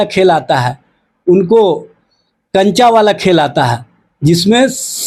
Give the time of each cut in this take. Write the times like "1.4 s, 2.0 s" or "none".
none